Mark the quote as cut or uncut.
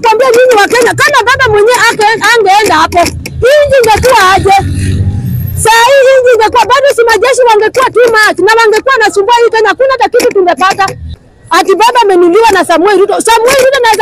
cut